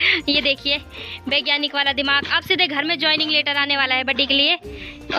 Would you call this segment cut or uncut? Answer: uncut